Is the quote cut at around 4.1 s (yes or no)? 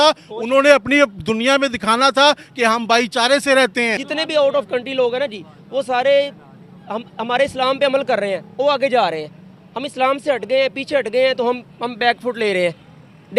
yes